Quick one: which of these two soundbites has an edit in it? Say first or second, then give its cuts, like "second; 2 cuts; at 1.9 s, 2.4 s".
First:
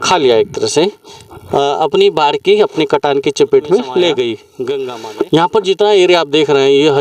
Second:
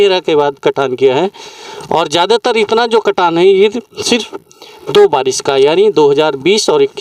first; 1 cut; at 5.0 s